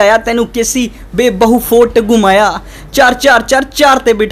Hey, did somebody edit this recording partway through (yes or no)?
no